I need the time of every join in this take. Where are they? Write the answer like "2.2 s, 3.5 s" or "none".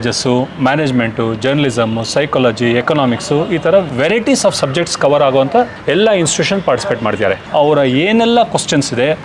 7.4 s